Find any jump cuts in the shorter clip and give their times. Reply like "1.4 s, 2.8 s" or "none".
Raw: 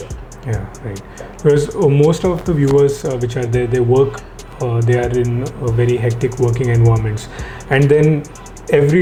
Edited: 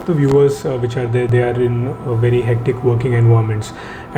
1.3 s